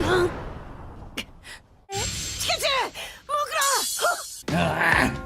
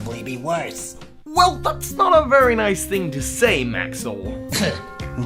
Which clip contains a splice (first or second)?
first